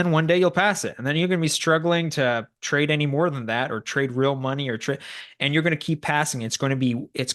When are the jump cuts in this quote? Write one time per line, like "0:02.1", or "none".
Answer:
none